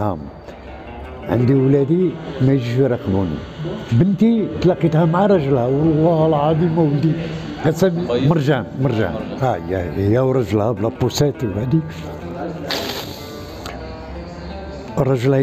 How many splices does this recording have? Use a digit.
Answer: 1